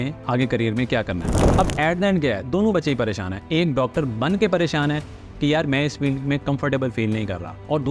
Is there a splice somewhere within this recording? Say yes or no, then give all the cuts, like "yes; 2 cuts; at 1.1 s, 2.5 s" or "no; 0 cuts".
yes; 1 cut; at 1.4 s